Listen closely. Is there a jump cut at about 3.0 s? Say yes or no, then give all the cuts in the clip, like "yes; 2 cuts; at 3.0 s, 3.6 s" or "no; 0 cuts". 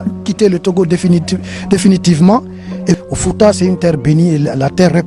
yes; 1 cut; at 3.0 s